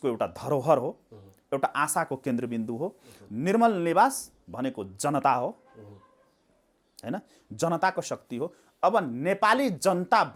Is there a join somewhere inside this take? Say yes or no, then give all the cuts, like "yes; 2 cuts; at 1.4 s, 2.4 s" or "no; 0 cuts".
no; 0 cuts